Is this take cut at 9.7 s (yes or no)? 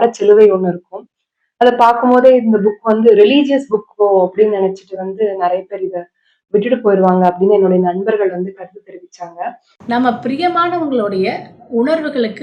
yes